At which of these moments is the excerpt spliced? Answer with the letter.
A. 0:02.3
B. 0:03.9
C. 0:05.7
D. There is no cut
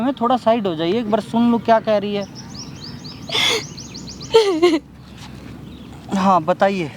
D